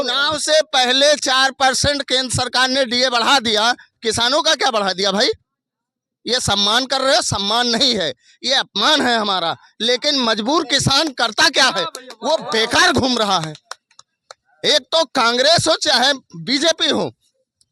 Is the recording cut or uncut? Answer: uncut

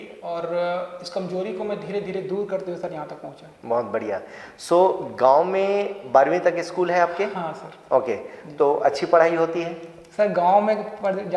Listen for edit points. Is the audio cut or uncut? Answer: uncut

